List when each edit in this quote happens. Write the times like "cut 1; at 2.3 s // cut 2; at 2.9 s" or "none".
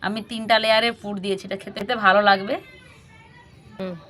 cut 1; at 1.8 s